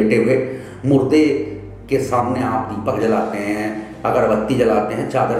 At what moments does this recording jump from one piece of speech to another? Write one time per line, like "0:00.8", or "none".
none